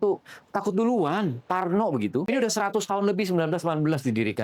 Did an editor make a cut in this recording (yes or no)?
yes